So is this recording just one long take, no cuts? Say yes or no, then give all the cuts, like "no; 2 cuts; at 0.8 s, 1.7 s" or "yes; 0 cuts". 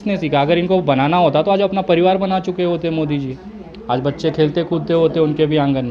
yes; 0 cuts